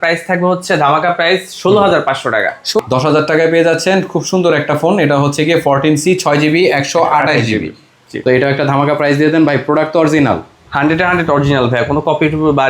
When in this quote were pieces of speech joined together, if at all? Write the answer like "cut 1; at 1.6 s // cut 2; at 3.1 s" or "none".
cut 1; at 2.8 s // cut 2; at 8.1 s